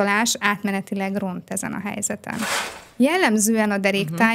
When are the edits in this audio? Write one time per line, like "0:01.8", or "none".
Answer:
0:02.8